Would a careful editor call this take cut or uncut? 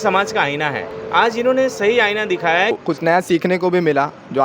cut